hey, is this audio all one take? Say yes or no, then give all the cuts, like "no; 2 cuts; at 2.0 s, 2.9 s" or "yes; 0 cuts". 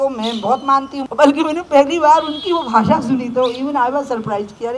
no; 1 cut; at 1.0 s